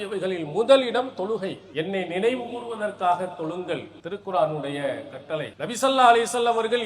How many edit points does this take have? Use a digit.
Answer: 3